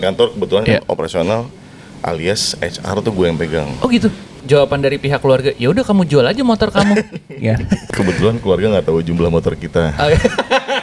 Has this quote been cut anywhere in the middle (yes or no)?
yes